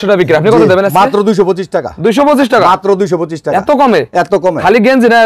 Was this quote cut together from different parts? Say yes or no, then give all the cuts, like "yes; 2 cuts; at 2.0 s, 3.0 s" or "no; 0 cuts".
no; 0 cuts